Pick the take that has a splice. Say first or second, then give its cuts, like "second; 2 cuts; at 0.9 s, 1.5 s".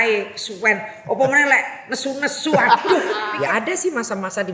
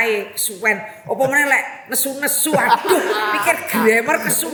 first; 1 cut; at 3.3 s